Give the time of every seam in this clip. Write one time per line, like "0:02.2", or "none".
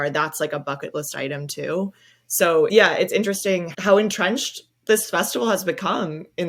none